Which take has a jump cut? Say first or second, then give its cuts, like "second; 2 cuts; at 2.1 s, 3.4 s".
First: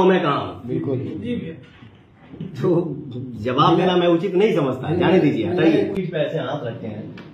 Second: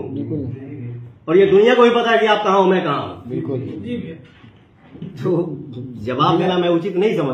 first; 1 cut; at 6.0 s